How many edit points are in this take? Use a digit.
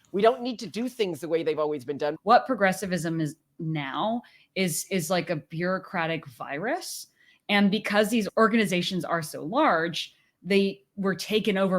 2